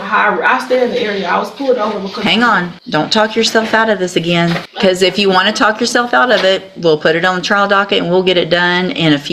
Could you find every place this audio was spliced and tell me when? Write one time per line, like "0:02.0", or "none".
0:02.8
0:04.7